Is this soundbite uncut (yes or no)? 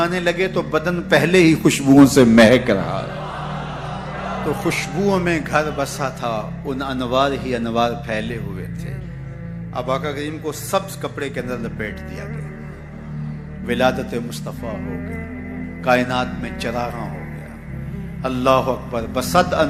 yes